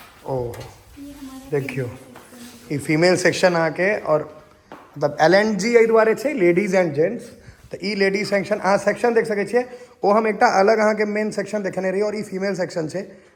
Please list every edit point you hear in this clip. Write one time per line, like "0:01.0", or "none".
none